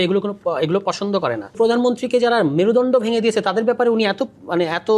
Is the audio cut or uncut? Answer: cut